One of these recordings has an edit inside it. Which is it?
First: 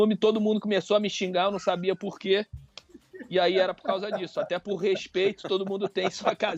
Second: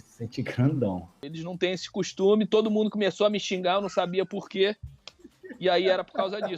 second; 1 cut; at 1.2 s

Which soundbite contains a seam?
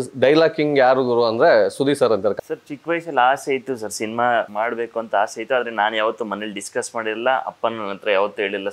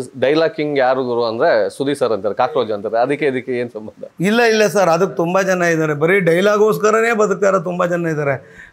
first; 2 cuts; at 2.3 s, 4.5 s

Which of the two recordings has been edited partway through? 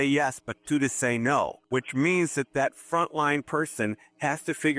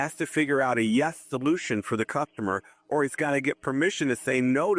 first; 1 cut; at 1.6 s

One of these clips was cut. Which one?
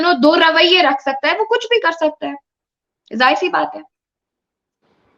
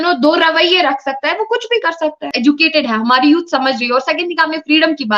second; 1 cut; at 2.3 s

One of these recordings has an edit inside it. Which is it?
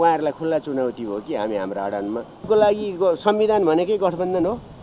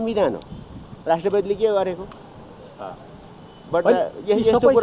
first; 1 cut; at 2.4 s

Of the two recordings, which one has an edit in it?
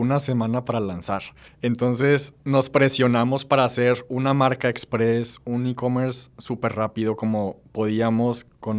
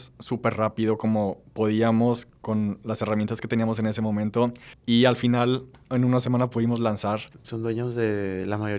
second; 2 cuts; at 4.7 s, 7.3 s

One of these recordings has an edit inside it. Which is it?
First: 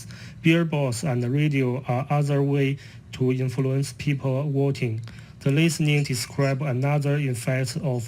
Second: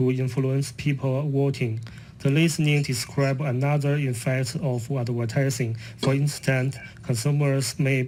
first; 1 cut; at 2.0 s

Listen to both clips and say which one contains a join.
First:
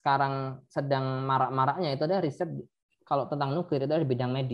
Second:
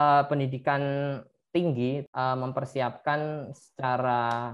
second; 1 cut; at 2.0 s

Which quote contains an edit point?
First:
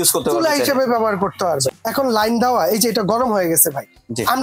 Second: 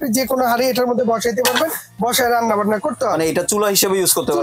first; 1 cut; at 1.7 s

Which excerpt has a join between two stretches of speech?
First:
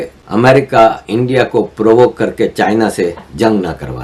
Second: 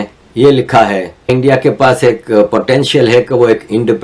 second; 1 cut; at 1.3 s

